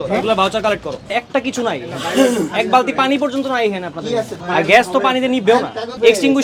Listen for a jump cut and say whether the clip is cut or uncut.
uncut